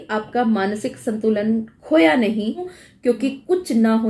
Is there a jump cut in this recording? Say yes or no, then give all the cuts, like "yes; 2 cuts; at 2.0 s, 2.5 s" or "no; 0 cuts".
yes; 1 cut; at 2.8 s